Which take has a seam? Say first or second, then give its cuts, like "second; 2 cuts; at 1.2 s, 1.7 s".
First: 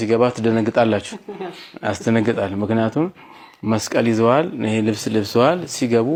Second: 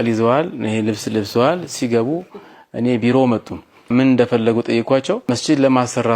second; 2 cuts; at 3.9 s, 5.2 s